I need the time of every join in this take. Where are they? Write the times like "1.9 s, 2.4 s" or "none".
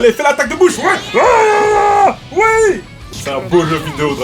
3.1 s

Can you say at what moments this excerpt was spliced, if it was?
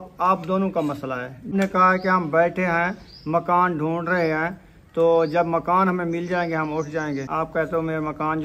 1.5 s, 7.3 s

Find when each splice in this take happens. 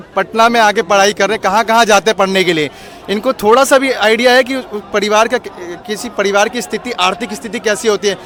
none

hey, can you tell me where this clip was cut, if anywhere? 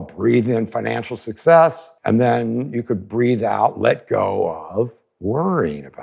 1.9 s, 5.0 s

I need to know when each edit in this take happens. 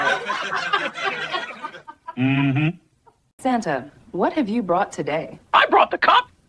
3.3 s

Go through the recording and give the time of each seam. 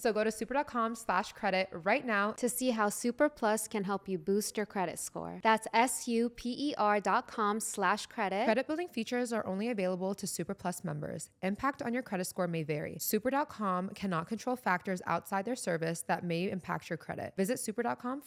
none

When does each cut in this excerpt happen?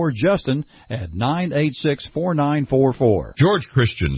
3.3 s

